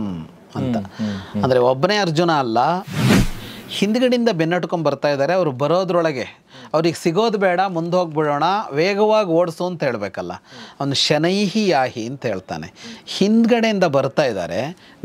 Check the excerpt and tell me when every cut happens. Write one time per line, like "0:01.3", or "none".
0:03.2